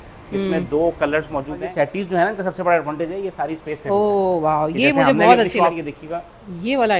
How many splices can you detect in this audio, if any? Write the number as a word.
two